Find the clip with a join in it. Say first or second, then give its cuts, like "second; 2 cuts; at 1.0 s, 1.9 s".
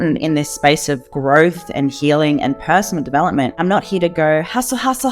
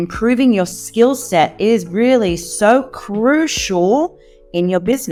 first; 1 cut; at 3.6 s